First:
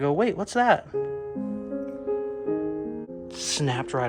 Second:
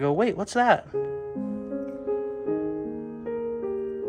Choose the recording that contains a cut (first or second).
first